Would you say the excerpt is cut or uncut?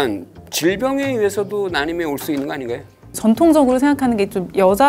cut